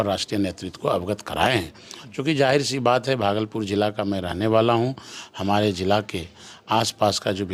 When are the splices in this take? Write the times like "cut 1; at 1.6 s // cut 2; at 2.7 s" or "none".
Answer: none